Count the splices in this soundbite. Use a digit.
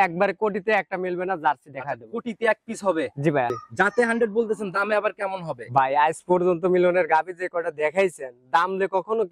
1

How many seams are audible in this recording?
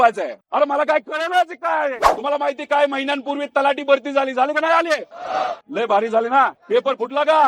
1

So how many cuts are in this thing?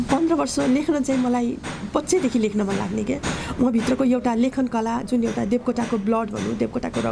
0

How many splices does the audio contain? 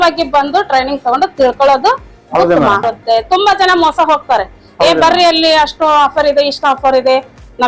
1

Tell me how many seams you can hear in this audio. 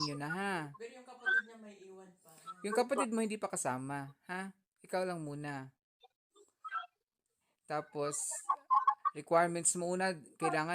0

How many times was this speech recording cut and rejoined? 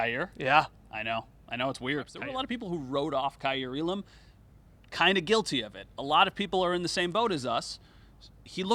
1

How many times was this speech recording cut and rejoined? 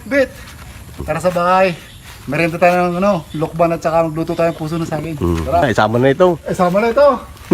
2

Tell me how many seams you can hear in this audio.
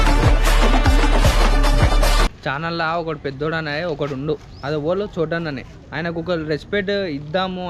1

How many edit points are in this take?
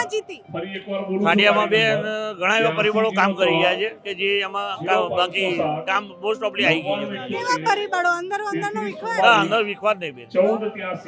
0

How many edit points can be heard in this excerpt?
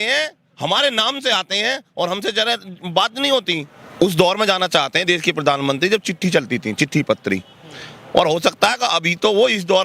1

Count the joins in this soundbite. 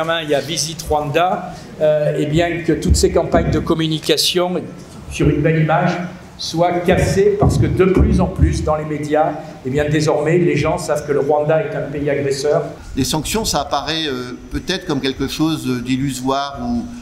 1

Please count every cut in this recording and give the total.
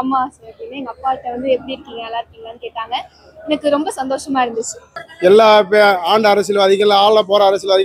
1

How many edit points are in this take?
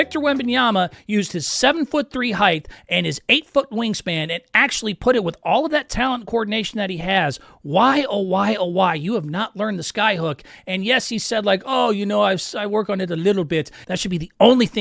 1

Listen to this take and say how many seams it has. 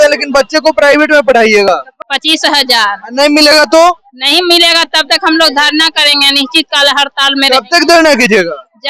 1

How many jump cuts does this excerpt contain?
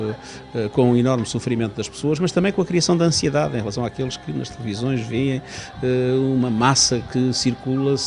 0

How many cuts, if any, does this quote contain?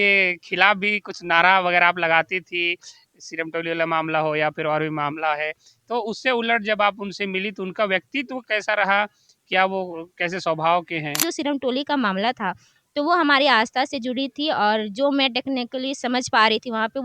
1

